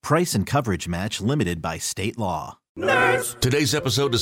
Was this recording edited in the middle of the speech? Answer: yes; 1 cut; at 2.6 s

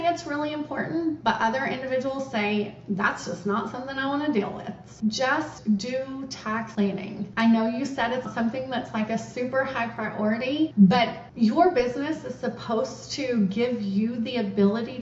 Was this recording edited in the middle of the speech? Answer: yes; 1 cut; at 5.0 s

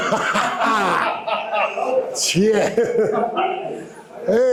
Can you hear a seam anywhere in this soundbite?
no; 0 cuts

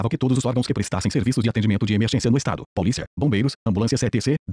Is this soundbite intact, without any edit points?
yes; 0 cuts

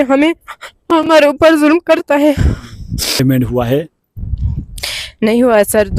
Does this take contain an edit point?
yes; 1 cut; at 3.2 s

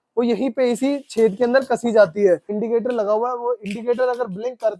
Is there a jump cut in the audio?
yes; 1 cut; at 2.6 s

